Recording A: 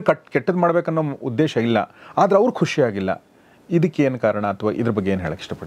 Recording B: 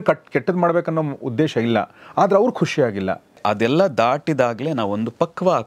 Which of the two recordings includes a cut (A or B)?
B